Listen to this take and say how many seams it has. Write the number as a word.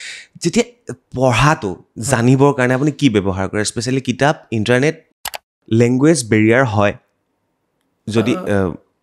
one